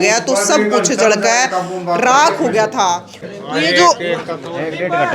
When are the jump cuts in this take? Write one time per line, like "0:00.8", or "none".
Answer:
0:03.2